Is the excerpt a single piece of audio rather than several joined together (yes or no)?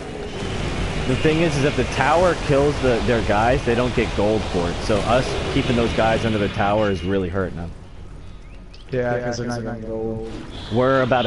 no